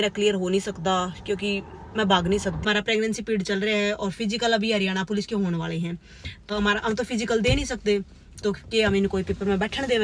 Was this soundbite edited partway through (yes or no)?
yes